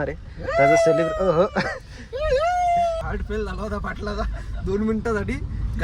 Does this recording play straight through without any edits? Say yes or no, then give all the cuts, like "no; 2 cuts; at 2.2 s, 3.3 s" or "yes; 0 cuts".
no; 1 cut; at 3.0 s